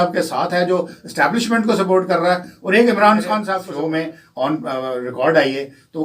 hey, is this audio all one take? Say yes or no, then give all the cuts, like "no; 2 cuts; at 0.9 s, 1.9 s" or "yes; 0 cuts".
no; 1 cut; at 3.6 s